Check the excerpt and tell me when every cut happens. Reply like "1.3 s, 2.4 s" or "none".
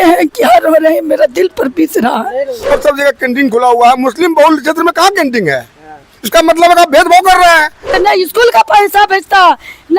2.7 s, 7.9 s